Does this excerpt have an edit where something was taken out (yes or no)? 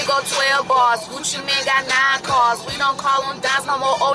no